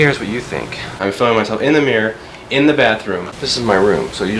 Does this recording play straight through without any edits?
no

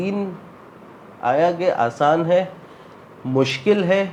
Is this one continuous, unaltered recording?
yes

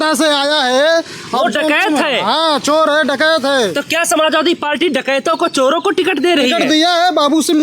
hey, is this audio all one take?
yes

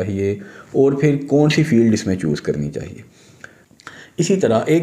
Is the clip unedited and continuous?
no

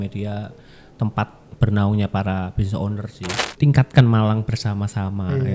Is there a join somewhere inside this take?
yes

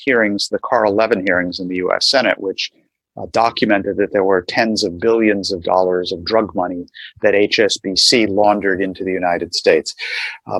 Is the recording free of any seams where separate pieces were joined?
yes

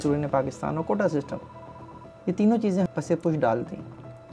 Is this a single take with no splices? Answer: no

